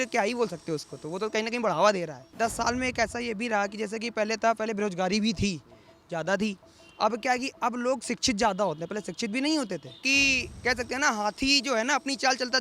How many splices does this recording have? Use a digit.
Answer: 2